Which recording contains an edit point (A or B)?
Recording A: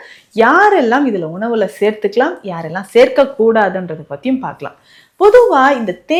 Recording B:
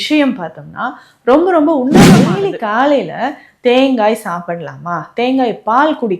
B